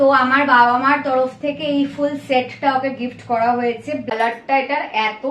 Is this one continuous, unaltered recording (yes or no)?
no